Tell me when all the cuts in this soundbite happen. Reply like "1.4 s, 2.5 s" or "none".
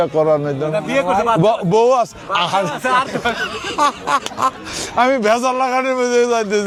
none

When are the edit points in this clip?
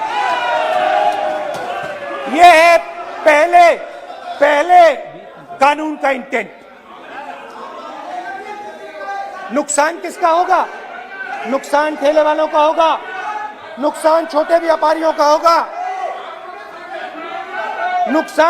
none

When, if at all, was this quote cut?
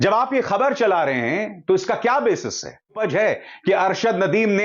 3.0 s

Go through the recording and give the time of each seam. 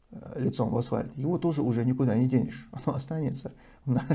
none

